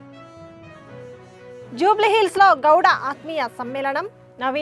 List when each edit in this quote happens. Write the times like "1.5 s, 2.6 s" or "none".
none